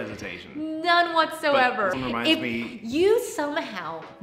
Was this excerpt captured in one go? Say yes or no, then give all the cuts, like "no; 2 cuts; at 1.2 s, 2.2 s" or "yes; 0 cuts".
no; 1 cut; at 1.9 s